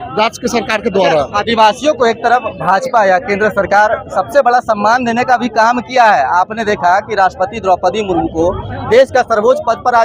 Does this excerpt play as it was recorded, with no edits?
yes; 0 cuts

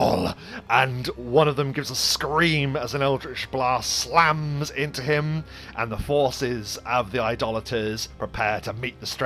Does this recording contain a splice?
no; 0 cuts

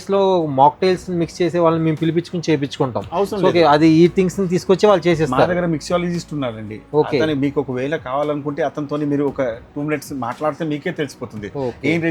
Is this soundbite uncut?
yes; 0 cuts

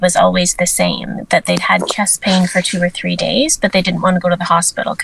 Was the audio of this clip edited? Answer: no; 0 cuts

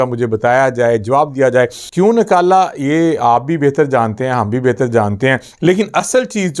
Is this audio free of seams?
no; 2 cuts; at 1.8 s, 5.5 s

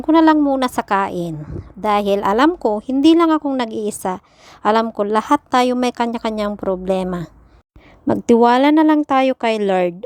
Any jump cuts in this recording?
no; 0 cuts

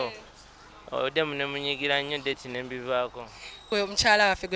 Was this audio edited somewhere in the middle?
yes; 1 cut; at 3.7 s

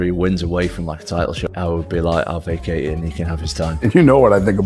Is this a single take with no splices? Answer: no; 1 cut; at 1.4 s

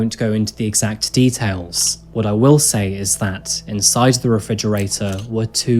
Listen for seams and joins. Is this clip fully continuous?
yes; 0 cuts

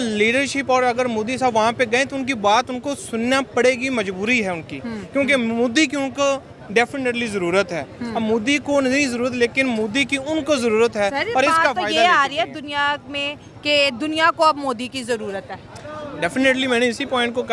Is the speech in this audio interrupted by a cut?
no; 0 cuts

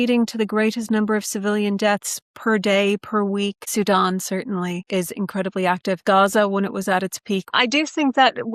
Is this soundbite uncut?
no; 2 cuts; at 4.8 s, 6.0 s

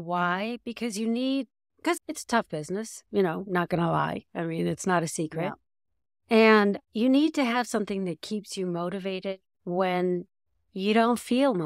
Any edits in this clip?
no; 0 cuts

